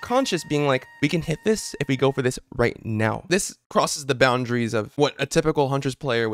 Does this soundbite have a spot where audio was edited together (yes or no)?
yes